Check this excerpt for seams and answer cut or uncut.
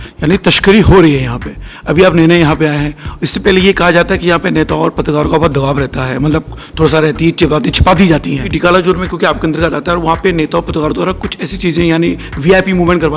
cut